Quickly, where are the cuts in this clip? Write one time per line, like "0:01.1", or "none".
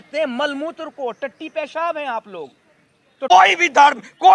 0:03.3